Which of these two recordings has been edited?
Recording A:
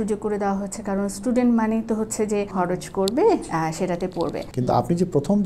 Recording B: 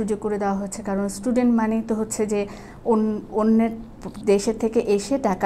A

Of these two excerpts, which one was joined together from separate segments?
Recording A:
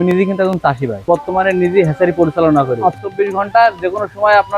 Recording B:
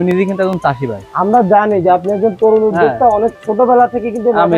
A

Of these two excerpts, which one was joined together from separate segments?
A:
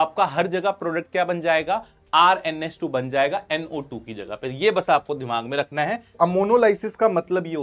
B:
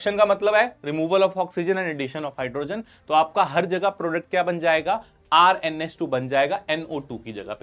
A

